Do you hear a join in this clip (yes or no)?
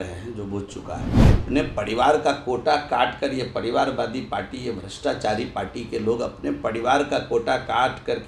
yes